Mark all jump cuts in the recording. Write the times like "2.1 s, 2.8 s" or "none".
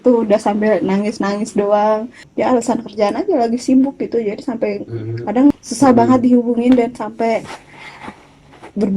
2.2 s, 5.5 s